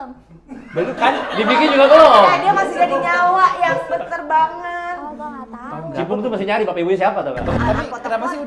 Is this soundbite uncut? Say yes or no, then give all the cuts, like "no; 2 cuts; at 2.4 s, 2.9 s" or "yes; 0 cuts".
no; 1 cut; at 7.5 s